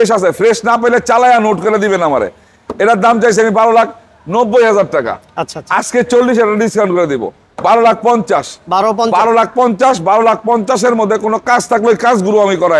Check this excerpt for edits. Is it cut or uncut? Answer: uncut